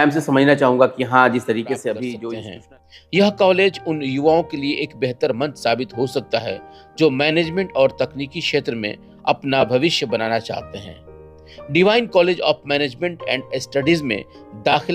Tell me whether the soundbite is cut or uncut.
cut